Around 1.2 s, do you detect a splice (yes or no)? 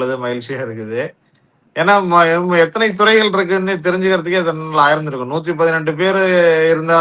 no